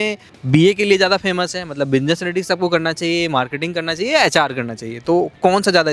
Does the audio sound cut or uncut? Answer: uncut